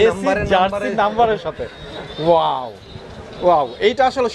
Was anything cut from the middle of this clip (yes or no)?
no